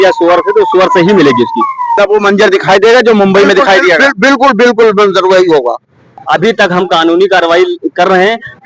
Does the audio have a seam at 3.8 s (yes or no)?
no